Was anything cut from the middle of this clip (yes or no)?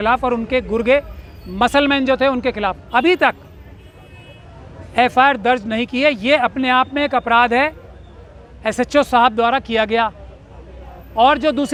no